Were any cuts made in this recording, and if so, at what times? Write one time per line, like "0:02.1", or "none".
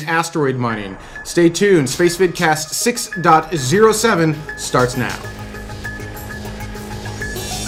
none

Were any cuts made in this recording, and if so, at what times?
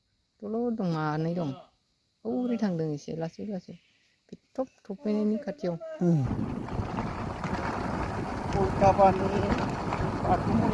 0:06.3

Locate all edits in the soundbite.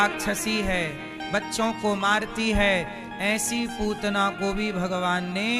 none

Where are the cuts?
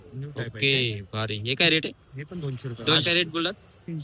0:03.0

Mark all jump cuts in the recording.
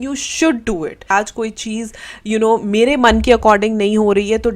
0:01.1

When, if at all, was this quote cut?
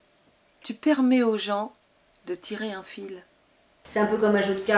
0:03.8

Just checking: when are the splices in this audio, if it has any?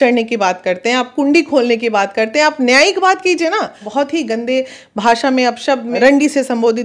0:03.8
0:05.9

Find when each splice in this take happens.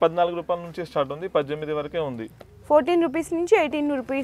none

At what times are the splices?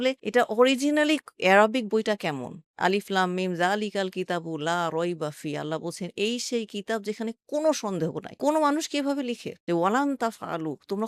0:02.6
0:09.5

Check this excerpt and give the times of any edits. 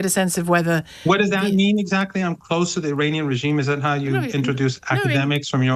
none

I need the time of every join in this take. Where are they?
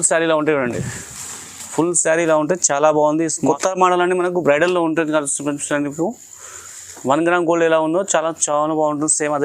0:03.4

